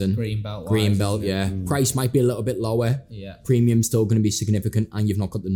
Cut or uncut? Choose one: uncut